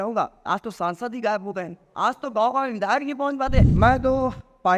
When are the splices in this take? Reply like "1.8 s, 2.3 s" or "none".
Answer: 3.7 s

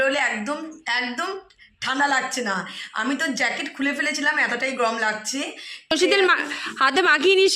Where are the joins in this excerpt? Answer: 5.9 s

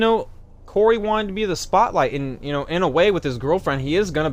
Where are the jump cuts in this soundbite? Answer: none

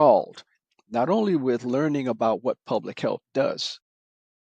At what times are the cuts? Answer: none

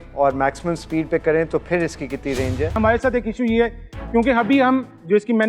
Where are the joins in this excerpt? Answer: 2.7 s

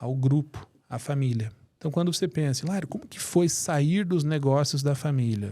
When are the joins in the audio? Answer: 1.6 s

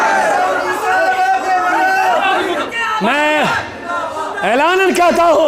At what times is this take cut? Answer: 2.2 s

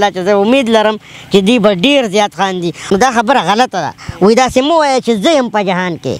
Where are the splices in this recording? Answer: 2.9 s

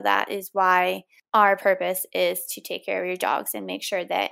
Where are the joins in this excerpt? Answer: 1.1 s

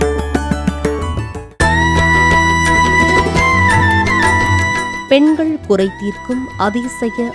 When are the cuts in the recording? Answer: 1.4 s

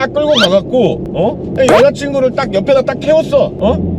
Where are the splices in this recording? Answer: none

